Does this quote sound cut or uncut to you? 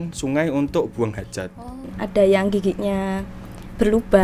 cut